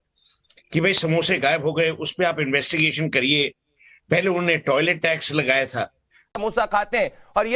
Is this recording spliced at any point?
yes; 1 cut; at 6.3 s

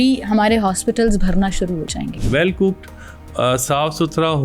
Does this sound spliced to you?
yes; 1 cut; at 2.2 s

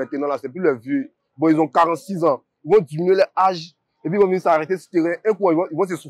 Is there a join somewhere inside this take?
no; 0 cuts

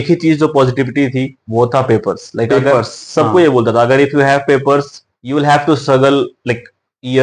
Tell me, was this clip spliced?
no; 0 cuts

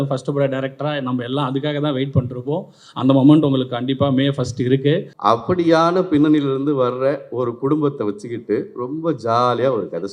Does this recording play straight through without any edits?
no; 1 cut; at 5.1 s

